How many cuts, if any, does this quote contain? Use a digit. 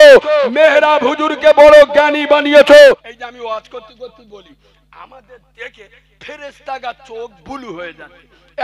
1